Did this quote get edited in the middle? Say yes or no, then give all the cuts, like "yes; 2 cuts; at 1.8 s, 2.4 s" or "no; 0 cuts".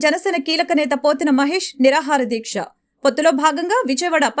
no; 0 cuts